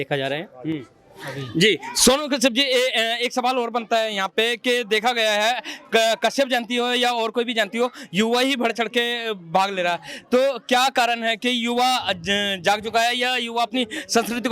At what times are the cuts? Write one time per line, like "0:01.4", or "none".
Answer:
none